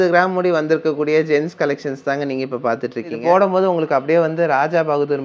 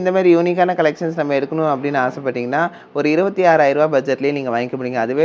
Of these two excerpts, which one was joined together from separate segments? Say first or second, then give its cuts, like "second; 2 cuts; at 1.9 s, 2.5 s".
first; 1 cut; at 3.2 s